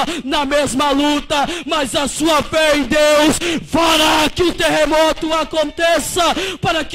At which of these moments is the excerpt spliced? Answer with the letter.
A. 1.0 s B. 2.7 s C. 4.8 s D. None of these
D